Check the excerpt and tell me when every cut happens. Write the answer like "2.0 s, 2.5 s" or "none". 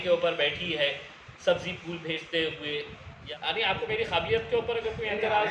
3.2 s